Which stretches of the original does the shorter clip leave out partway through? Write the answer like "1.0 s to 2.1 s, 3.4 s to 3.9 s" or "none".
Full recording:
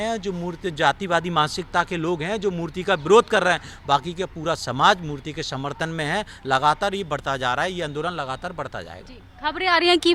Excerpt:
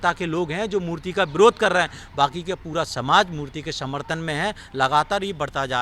none

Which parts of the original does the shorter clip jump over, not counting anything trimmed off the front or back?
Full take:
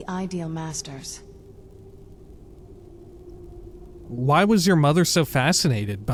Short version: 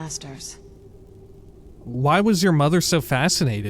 2.5 s to 4.1 s

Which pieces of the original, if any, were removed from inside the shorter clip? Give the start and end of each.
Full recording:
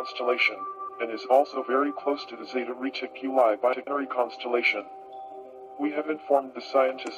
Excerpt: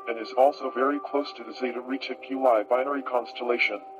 3.8 s to 3.9 s

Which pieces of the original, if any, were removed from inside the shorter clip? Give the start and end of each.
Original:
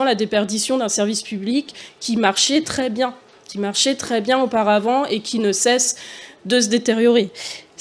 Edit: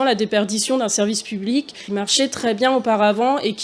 1.8 s to 3.4 s

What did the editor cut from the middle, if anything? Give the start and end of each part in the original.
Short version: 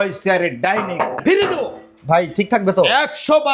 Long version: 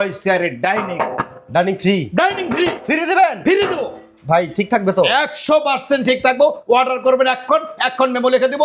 1.2 s to 3.4 s

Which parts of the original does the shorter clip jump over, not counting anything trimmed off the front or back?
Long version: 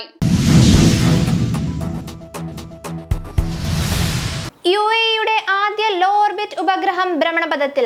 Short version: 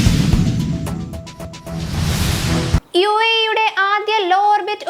2.6 s to 3.3 s

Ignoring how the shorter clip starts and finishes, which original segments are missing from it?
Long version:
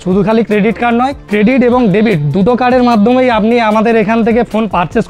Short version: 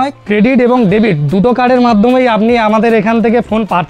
none

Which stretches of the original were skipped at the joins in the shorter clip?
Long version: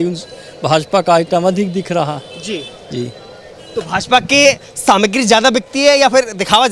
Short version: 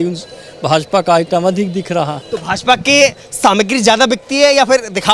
2.2 s to 3.7 s

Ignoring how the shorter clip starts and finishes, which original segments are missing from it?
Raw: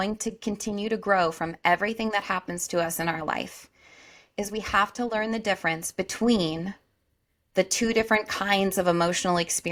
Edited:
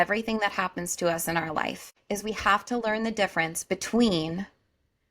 3.6 s to 4.2 s

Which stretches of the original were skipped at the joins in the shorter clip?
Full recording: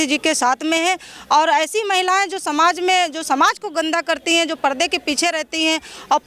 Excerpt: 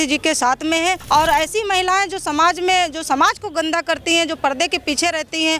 1.0 s to 1.2 s

